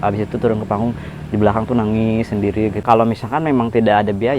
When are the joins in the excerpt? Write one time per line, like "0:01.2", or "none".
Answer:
0:02.8